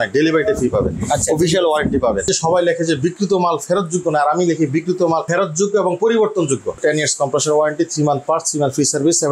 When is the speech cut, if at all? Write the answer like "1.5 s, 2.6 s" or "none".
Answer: 2.3 s, 6.8 s